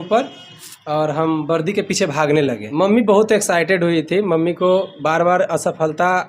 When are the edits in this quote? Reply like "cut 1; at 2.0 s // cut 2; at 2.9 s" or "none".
cut 1; at 2.6 s